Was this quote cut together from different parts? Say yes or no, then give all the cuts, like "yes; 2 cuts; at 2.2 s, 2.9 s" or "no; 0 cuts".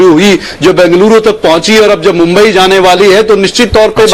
no; 0 cuts